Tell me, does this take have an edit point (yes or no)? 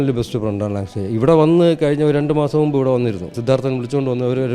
yes